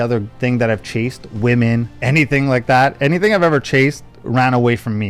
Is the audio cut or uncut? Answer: uncut